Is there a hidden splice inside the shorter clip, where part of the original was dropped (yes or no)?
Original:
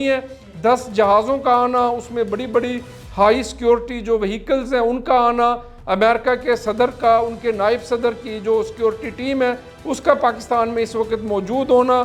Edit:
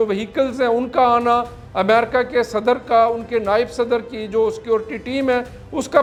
no